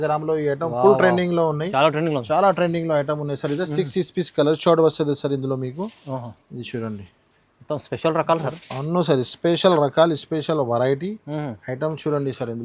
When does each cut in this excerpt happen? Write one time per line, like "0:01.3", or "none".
none